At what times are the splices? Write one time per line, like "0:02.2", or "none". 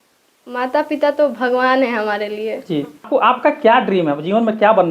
none